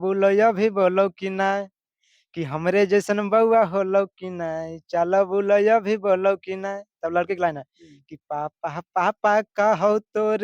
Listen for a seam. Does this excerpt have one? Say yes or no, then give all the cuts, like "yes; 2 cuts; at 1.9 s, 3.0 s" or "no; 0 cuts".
no; 0 cuts